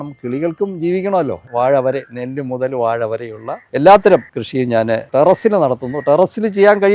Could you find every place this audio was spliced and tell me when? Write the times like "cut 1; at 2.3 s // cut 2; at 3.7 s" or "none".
cut 1; at 1.4 s // cut 2; at 4.4 s